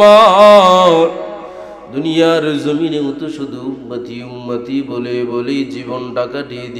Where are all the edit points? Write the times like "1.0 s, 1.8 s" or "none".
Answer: none